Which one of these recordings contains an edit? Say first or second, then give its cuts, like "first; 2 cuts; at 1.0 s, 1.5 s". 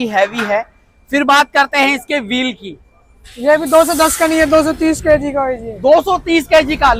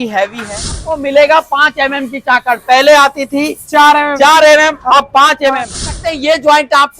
second; 2 cuts; at 0.9 s, 6.1 s